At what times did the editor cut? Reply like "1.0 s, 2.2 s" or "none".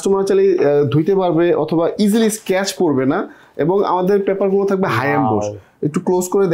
none